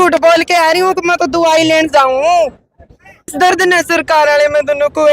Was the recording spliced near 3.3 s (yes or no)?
yes